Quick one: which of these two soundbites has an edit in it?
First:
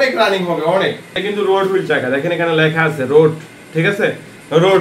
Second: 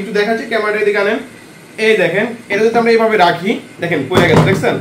first; 1 cut; at 1.2 s

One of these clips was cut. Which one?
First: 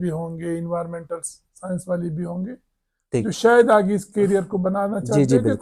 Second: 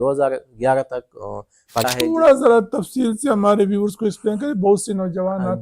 second; 1 cut; at 1.8 s

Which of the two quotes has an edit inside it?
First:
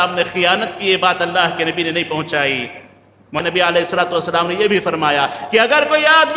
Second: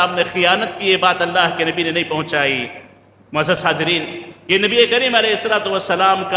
first; 1 cut; at 3.4 s

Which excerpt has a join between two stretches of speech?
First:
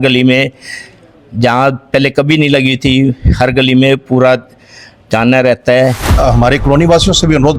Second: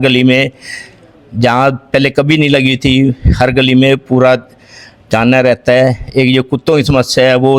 first; 1 cut; at 6.1 s

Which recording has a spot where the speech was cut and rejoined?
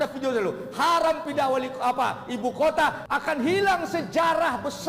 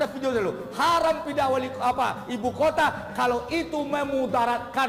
first; 1 cut; at 3.0 s

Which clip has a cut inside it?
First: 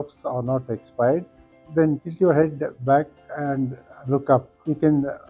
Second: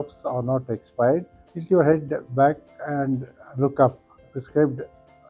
second; 2 cuts; at 1.6 s, 4.1 s

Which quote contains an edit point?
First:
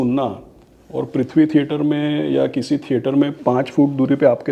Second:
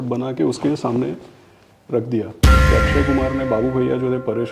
second; 1 cut; at 2.7 s

